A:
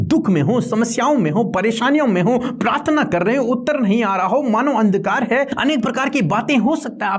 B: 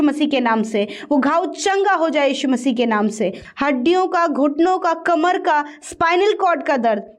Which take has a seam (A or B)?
B